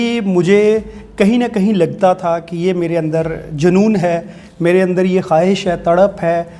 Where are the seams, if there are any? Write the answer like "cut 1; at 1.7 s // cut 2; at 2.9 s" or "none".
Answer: none